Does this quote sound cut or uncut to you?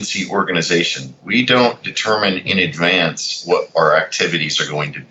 uncut